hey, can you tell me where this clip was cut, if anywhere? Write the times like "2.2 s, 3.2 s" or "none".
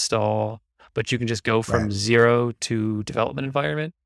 none